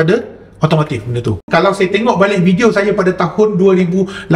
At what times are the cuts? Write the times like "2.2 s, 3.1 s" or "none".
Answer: 1.5 s